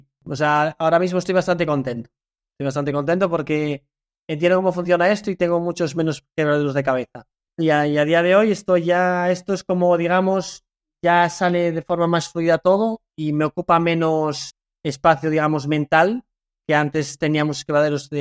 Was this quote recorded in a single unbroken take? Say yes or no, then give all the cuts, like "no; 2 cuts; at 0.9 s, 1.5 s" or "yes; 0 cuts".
no; 1 cut; at 7.4 s